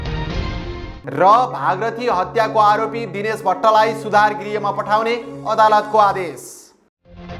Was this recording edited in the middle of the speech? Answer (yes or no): yes